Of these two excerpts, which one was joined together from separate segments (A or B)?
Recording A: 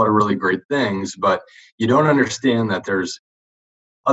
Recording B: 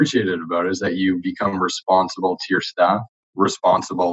B